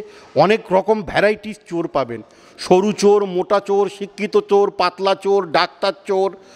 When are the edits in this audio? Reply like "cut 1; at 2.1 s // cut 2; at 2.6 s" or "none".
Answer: none

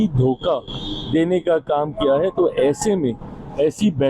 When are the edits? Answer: none

